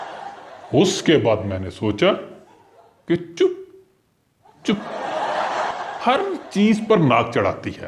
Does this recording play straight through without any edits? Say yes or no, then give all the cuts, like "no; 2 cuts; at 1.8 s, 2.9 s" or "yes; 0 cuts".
no; 1 cut; at 5.7 s